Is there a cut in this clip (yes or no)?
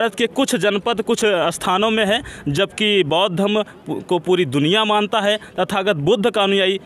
no